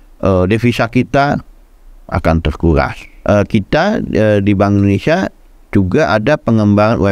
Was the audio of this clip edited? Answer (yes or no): yes